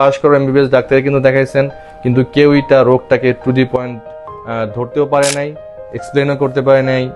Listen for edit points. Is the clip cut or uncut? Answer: uncut